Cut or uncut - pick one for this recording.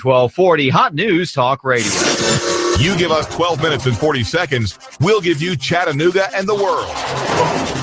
cut